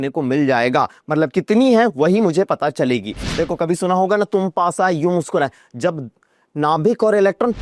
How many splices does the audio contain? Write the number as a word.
one